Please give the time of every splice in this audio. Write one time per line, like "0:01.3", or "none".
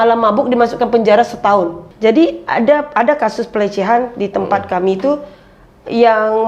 0:01.8